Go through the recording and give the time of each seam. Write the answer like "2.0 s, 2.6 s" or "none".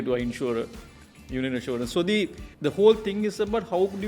2.4 s